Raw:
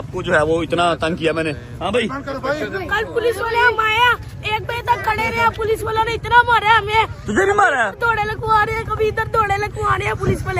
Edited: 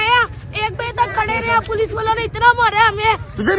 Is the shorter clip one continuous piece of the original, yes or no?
yes